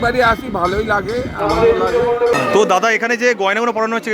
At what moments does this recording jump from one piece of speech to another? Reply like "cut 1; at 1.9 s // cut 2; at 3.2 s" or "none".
cut 1; at 2.3 s